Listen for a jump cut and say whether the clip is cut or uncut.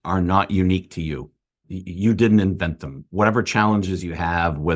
cut